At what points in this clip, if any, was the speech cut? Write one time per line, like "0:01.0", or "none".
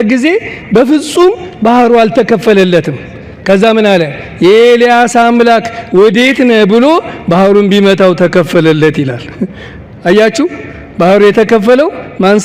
none